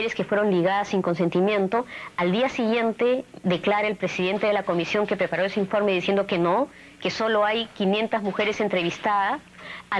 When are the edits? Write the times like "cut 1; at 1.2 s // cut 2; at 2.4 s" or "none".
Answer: cut 1; at 2.6 s